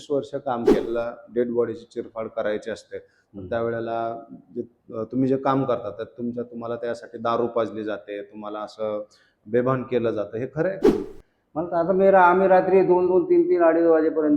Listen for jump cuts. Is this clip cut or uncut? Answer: cut